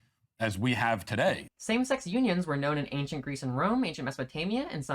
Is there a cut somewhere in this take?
yes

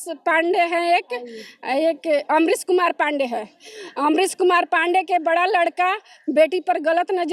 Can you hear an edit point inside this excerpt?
no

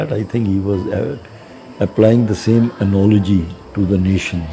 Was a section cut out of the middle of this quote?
yes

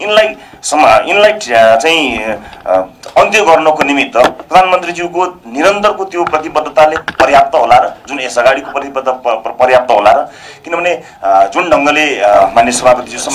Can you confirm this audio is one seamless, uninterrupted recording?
no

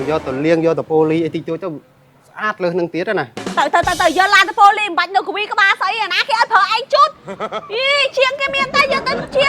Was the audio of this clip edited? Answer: yes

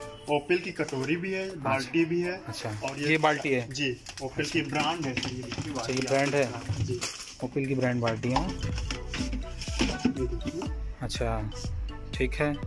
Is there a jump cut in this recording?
no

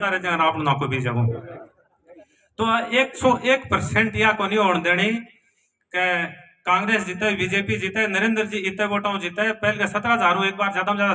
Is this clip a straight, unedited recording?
yes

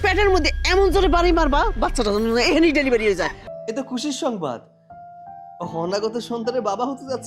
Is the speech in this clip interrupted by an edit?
yes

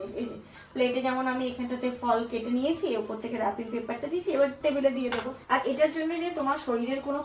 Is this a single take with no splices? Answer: no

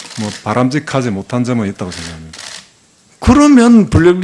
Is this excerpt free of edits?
yes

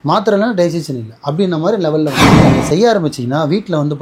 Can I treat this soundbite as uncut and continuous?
no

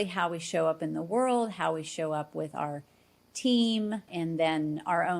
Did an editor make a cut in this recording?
yes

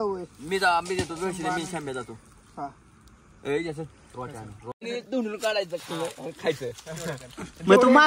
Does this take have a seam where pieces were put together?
yes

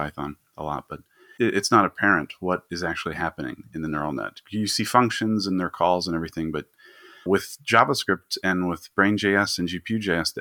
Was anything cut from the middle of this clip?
yes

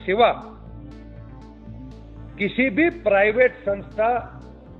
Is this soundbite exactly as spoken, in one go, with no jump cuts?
yes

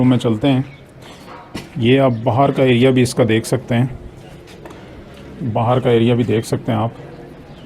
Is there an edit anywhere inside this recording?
no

